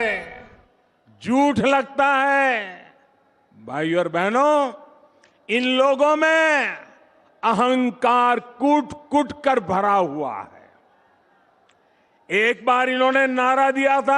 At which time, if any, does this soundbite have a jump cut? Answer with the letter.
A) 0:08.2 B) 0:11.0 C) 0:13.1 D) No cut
D